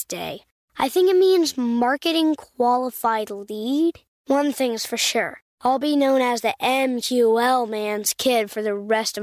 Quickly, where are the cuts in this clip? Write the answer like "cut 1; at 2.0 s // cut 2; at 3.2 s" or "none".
none